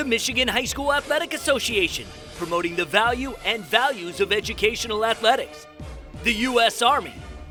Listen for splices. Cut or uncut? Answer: uncut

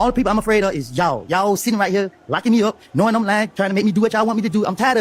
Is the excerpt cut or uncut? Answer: uncut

